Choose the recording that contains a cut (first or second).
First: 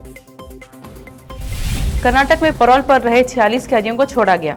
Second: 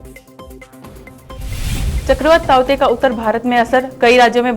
second